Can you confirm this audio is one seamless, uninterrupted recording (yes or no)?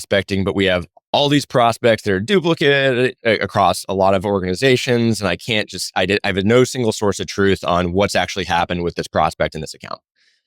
no